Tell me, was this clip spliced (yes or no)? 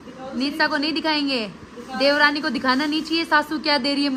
no